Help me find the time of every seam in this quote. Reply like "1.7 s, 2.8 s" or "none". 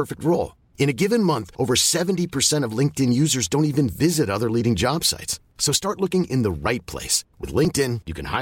none